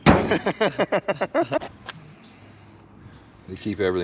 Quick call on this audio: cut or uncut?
cut